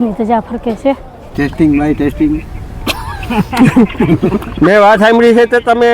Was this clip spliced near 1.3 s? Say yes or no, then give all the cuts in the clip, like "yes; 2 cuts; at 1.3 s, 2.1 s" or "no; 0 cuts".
yes; 1 cut; at 1.3 s